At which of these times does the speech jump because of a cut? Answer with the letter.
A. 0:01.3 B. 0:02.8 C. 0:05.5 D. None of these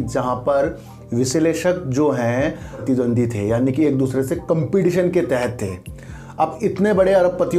B